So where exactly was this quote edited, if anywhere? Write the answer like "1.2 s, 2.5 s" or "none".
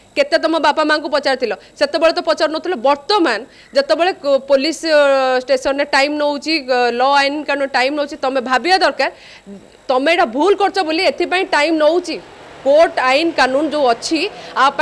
none